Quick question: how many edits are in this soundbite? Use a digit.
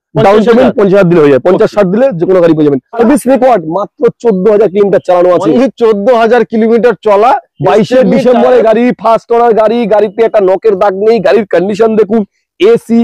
1